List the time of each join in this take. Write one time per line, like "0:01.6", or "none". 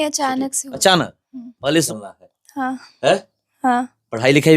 0:01.9